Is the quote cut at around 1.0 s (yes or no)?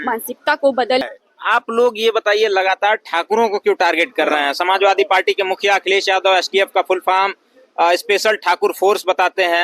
yes